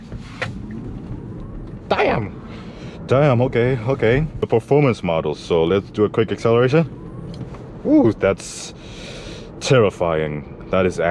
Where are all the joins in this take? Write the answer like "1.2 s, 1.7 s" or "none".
4.3 s